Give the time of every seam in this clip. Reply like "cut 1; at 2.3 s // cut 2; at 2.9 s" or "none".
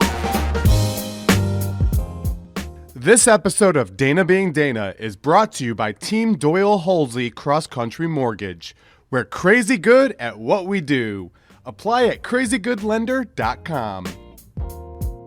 none